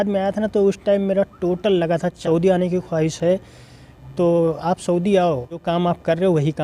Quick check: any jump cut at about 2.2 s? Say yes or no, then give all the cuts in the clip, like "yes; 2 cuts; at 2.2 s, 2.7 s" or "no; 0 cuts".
yes; 2 cuts; at 2.2 s, 5.6 s